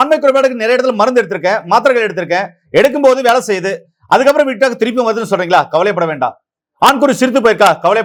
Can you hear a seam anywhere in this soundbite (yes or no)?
no